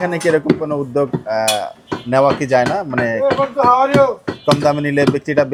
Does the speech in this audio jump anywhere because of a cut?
no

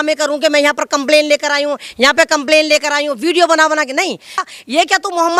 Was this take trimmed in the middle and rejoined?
yes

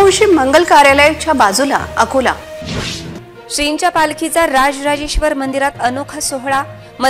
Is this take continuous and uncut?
yes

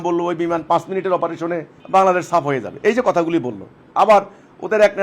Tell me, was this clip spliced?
yes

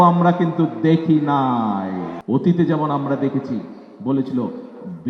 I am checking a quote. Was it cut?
yes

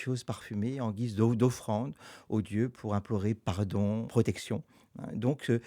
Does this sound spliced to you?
yes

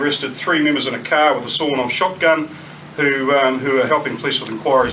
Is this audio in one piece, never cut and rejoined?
yes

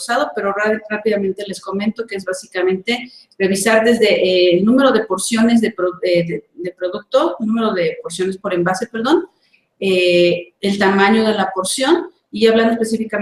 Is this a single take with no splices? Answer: yes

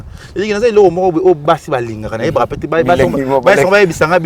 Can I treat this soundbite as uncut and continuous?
yes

